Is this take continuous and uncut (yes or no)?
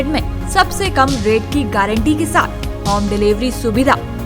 yes